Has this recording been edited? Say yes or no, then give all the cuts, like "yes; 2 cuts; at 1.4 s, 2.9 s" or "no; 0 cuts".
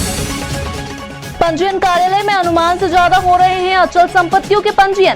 yes; 1 cut; at 1.3 s